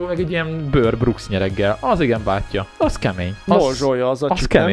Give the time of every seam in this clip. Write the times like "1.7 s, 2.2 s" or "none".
3.2 s